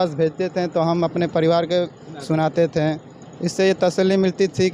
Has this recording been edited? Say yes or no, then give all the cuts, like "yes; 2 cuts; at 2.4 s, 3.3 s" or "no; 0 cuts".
no; 0 cuts